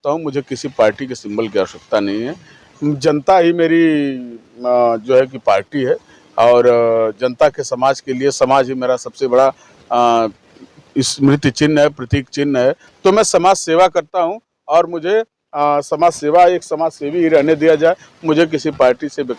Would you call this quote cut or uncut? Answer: uncut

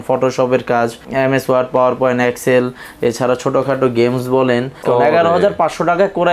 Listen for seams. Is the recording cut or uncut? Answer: cut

